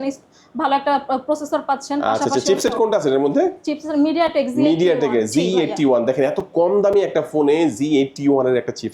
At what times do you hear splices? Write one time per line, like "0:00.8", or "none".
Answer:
none